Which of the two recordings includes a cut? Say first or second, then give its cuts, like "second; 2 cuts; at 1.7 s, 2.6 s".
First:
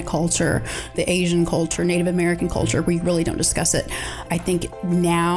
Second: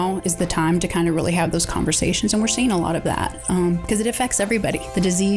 first; 3 cuts; at 0.9 s, 1.7 s, 4.3 s